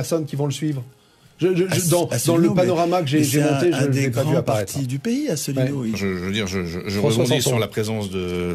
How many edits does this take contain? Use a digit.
1